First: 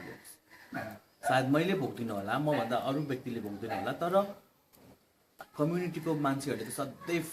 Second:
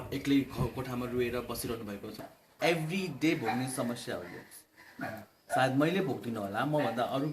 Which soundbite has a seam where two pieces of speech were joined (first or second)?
second